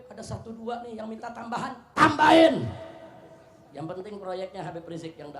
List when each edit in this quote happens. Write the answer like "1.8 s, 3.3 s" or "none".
none